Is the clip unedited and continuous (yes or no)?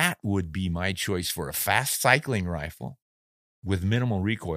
yes